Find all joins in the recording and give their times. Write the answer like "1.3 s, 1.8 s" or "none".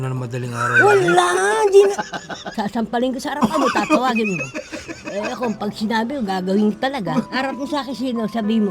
2.5 s, 7.3 s